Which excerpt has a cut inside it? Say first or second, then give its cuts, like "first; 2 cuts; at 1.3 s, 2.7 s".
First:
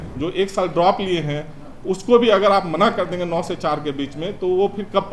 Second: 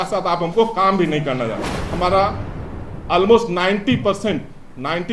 second; 1 cut; at 1.8 s